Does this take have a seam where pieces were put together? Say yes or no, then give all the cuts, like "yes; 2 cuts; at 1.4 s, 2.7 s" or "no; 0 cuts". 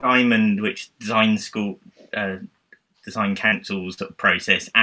no; 0 cuts